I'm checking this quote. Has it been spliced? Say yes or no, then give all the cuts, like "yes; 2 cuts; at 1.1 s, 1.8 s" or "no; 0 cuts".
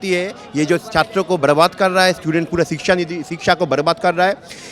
no; 0 cuts